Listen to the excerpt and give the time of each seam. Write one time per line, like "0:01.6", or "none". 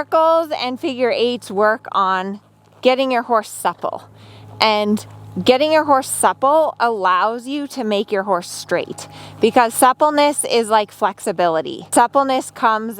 0:11.9

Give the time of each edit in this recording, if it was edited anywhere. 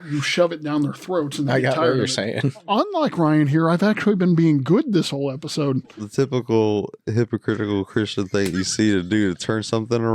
0:02.7
0:06.0

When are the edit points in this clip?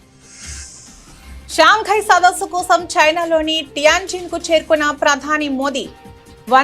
0:01.1

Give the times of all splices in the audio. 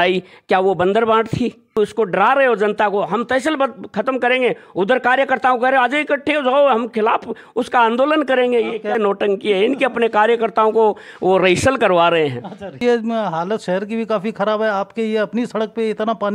0:01.7
0:12.8

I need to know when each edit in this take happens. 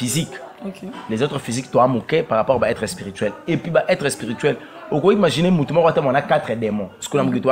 none

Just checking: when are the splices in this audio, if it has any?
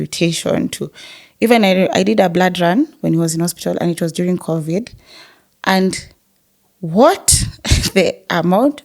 none

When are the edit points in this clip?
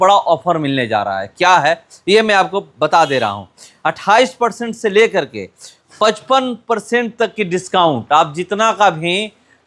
none

